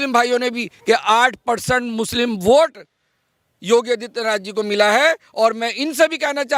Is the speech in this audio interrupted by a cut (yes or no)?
no